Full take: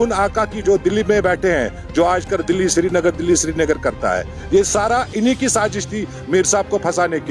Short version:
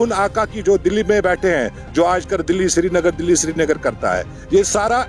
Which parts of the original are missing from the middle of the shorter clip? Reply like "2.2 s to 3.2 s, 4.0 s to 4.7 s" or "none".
none